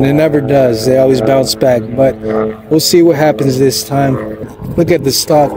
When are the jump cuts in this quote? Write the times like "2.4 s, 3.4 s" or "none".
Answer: 4.6 s